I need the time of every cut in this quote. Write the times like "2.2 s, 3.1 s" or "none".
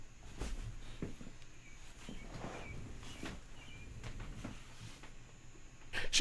none